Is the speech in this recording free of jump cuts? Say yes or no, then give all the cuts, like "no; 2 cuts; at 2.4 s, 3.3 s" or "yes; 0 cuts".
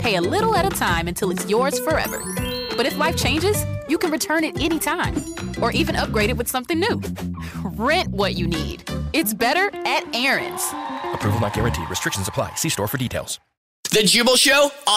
no; 1 cut; at 13.8 s